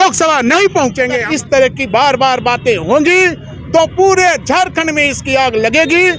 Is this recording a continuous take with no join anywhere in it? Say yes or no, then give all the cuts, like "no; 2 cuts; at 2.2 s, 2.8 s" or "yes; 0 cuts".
no; 1 cut; at 1.2 s